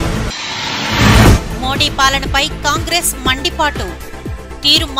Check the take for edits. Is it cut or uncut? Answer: cut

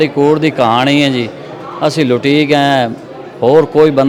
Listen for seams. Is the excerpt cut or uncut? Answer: uncut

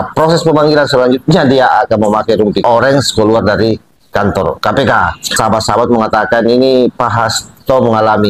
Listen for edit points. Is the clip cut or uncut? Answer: cut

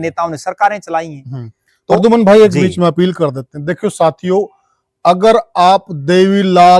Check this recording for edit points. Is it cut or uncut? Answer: uncut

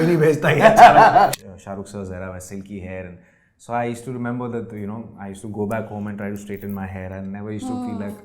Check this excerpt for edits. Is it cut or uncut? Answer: cut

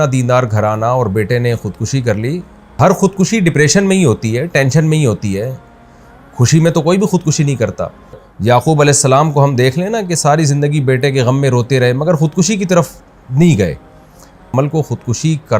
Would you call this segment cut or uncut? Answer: cut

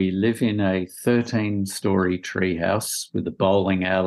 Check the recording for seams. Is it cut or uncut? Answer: uncut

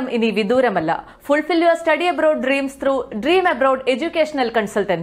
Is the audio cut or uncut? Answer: uncut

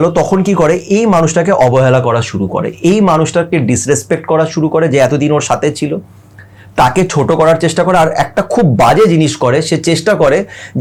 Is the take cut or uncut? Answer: uncut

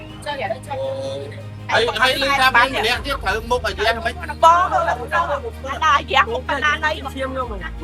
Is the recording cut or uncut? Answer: uncut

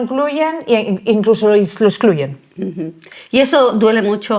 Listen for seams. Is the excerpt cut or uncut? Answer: uncut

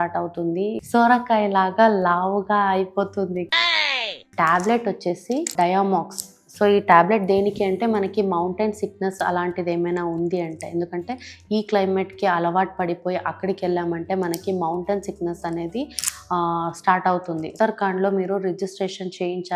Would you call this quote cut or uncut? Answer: cut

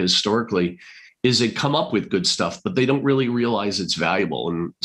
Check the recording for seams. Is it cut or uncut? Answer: uncut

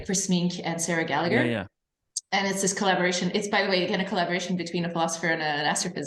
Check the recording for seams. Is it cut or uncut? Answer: uncut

